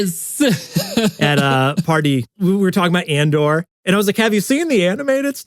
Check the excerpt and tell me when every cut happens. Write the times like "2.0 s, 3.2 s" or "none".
1.2 s, 3.7 s